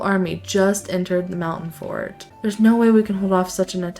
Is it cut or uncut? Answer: cut